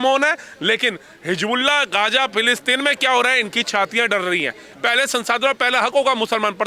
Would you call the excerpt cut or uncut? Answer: cut